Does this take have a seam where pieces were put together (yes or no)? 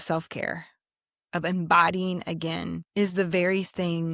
yes